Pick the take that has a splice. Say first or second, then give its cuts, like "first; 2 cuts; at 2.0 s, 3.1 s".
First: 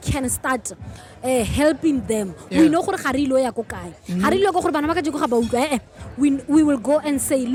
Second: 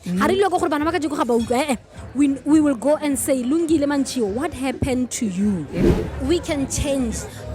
second; 1 cut; at 5.8 s